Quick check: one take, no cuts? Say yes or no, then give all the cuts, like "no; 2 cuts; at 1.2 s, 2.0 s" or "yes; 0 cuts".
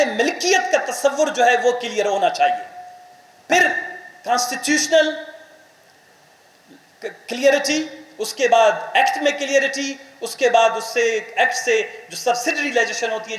yes; 0 cuts